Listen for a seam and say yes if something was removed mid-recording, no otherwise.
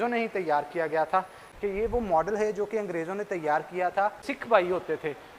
yes